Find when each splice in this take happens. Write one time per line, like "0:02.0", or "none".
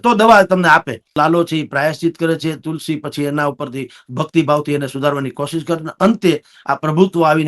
0:01.2